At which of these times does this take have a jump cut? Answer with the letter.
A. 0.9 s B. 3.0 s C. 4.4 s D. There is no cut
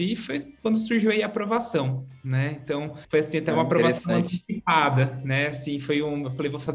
B